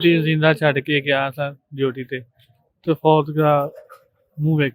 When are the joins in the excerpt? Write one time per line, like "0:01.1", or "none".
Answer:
none

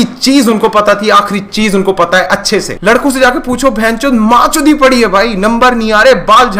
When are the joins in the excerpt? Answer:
0:02.7

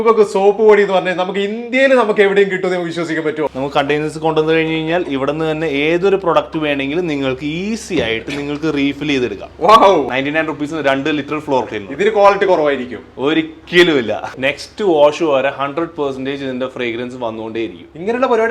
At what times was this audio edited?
0:03.5
0:10.1
0:14.3

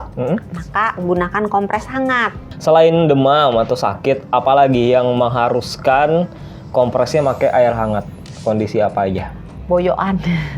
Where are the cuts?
0:02.5

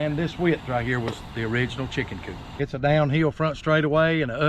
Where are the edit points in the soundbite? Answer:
0:02.4

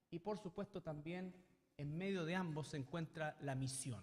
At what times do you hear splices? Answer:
0:01.5

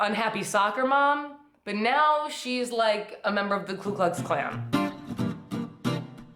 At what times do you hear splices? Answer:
0:04.6

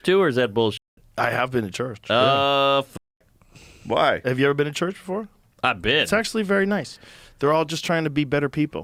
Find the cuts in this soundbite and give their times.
none

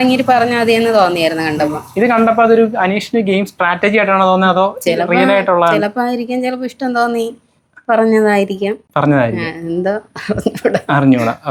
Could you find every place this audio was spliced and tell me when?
none

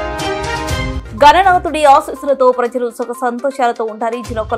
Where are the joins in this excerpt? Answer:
0:00.9

